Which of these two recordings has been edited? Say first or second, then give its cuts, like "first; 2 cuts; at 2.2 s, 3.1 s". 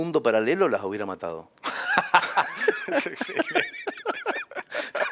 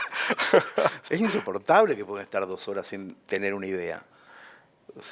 second; 1 cut; at 1.0 s